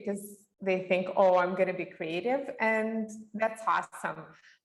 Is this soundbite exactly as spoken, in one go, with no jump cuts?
yes; 0 cuts

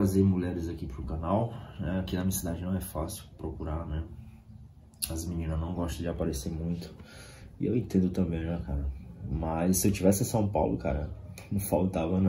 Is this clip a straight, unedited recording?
yes; 0 cuts

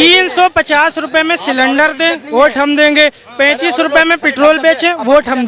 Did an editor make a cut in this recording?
no; 0 cuts

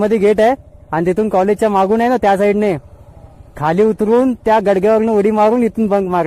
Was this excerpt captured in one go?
yes; 0 cuts

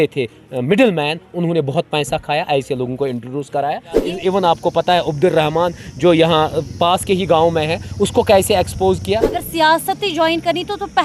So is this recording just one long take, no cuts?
no; 2 cuts; at 4.1 s, 9.4 s

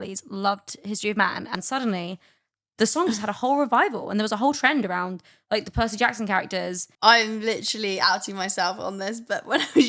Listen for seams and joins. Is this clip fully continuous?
no; 2 cuts; at 1.5 s, 6.8 s

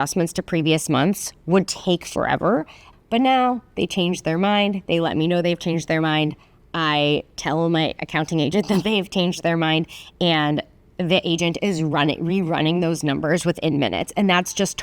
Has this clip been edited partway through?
yes; 1 cut; at 2.8 s

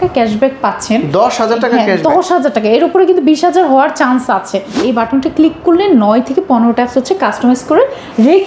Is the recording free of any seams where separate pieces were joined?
no; 1 cut; at 4.8 s

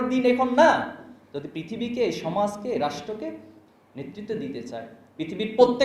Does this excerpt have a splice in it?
no; 0 cuts

